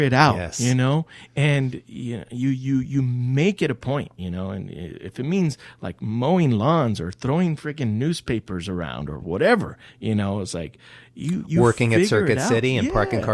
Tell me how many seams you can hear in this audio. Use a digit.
0